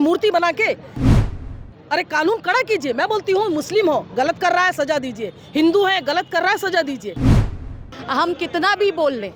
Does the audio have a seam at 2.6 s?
no; 2 cuts; at 1.2 s, 7.4 s

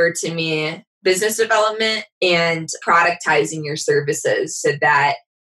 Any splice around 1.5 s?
no; 1 cut; at 2.7 s

